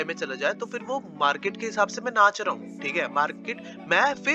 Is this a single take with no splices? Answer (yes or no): yes